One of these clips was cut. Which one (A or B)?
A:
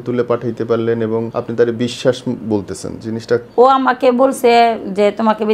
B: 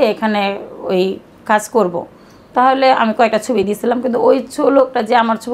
A